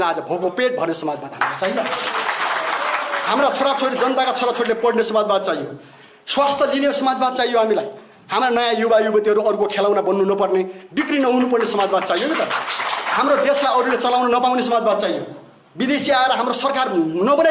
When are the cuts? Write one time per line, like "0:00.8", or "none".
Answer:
none